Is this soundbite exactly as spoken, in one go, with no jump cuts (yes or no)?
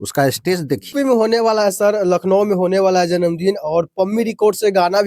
no